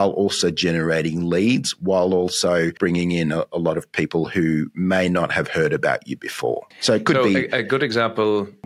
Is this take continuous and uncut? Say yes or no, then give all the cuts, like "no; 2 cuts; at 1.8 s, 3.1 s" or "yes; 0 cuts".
yes; 0 cuts